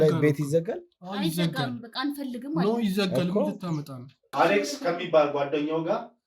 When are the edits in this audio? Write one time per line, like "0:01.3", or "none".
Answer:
0:04.2